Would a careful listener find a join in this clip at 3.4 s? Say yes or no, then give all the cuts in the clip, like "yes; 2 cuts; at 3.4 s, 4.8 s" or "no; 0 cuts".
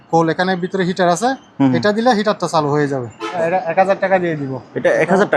yes; 1 cut; at 3.4 s